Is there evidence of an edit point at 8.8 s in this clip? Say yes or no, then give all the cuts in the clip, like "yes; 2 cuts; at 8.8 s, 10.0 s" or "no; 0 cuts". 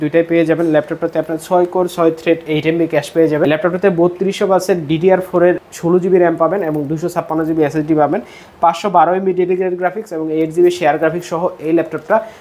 no; 2 cuts; at 3.5 s, 5.7 s